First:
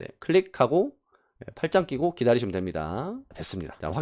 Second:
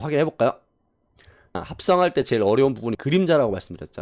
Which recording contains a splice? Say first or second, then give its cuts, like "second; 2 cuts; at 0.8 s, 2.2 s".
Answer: second; 2 cuts; at 1.6 s, 3.0 s